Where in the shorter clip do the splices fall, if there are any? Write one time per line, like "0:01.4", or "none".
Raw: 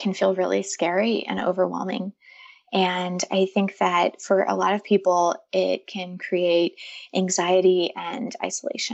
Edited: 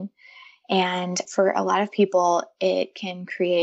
0:01.2